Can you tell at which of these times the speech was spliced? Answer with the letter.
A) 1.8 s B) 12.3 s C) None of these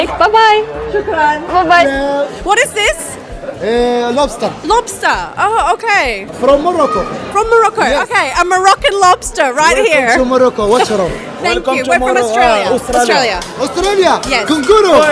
A